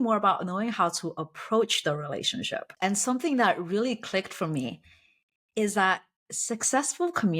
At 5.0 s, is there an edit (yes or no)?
no